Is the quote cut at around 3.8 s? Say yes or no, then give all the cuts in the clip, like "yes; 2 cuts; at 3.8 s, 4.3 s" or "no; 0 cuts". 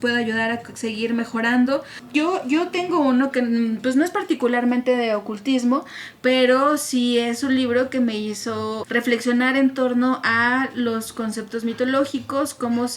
no; 2 cuts; at 2.0 s, 8.8 s